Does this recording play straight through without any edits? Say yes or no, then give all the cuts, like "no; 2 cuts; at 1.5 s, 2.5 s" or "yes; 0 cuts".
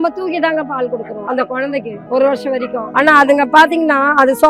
no; 2 cuts; at 1.6 s, 2.8 s